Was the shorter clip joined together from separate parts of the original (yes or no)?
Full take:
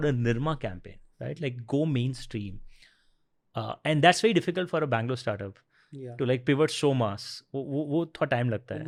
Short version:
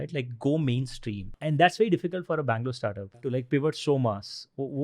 yes